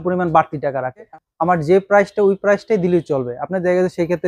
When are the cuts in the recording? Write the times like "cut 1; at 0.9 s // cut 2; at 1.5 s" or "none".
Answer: cut 1; at 1.1 s

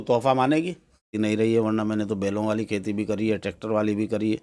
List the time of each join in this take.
cut 1; at 1.1 s

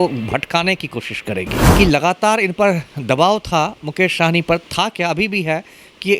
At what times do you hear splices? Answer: cut 1; at 1.6 s

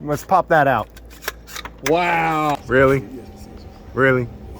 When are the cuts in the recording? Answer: cut 1; at 2.6 s

